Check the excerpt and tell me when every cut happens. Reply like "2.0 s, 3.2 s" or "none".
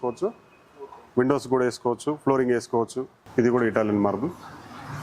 3.1 s